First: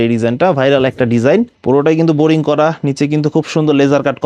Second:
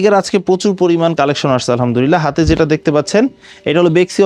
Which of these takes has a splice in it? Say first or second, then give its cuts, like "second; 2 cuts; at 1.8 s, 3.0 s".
first; 1 cut; at 1.5 s